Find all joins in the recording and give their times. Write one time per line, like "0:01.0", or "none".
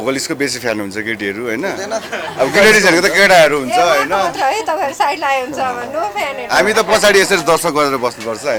none